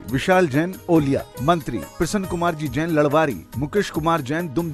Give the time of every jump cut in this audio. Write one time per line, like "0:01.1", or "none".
none